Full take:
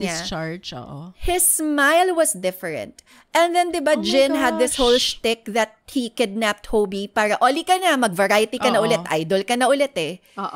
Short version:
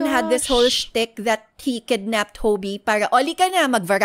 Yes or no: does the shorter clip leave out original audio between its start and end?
no